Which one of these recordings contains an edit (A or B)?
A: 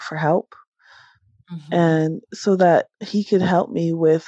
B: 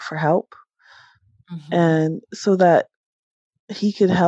A